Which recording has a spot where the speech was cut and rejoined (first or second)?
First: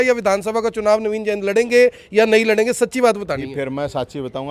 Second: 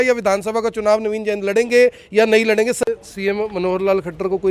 second